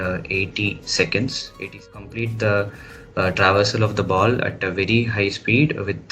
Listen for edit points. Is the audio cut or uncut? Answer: cut